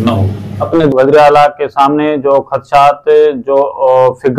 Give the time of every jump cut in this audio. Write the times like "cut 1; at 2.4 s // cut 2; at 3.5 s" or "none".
cut 1; at 0.9 s